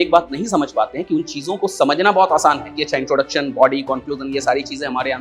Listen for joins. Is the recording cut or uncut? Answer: uncut